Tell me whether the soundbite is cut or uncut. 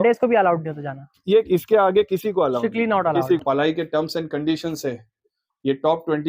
cut